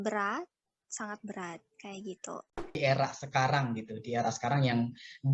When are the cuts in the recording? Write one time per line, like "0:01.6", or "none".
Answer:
0:02.7